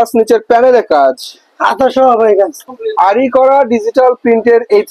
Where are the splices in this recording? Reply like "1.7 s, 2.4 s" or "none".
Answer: 2.6 s